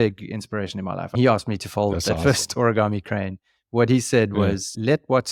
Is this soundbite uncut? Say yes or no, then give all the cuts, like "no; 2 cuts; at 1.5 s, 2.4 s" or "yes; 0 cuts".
yes; 0 cuts